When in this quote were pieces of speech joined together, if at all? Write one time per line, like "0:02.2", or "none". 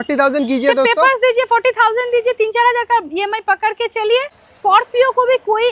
0:04.4